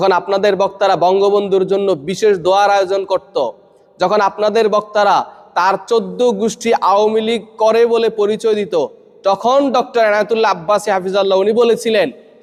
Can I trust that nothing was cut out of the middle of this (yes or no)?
yes